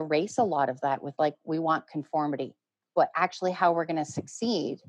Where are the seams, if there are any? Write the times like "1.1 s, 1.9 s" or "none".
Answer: 2.8 s

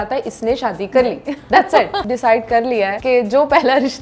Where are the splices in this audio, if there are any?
2.0 s, 3.0 s

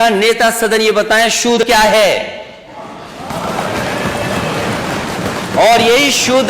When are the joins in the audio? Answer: 1.6 s

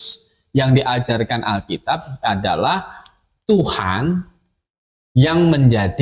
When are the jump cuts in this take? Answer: none

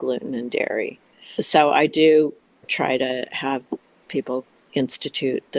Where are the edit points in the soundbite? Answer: 1.4 s, 2.7 s, 4.6 s

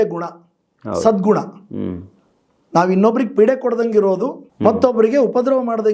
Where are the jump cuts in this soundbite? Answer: 4.5 s

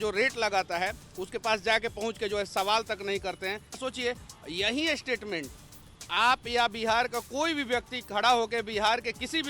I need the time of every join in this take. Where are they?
3.8 s

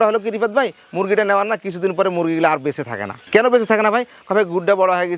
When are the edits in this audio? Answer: none

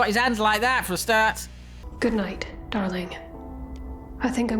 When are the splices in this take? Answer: 1.8 s

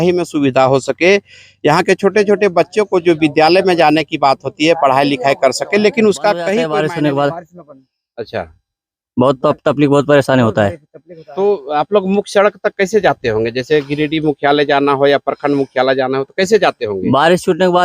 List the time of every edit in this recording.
6.6 s

